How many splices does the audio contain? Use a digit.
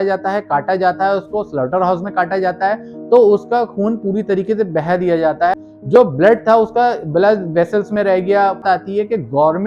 2